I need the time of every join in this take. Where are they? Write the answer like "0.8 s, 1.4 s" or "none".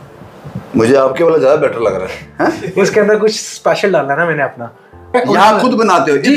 5.1 s